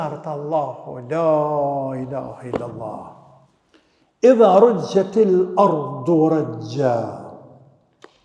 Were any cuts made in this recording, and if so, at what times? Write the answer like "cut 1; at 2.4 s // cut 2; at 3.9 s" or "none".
none